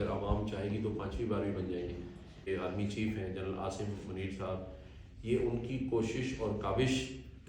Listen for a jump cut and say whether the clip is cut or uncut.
cut